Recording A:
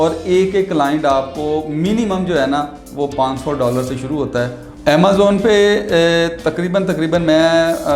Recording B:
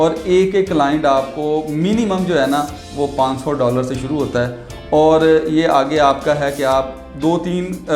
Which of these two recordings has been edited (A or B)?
A